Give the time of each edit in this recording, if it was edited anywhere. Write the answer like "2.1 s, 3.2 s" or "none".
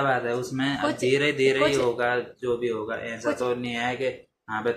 none